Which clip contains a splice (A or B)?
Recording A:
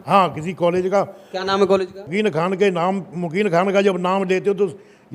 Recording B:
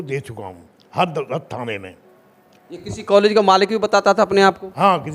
A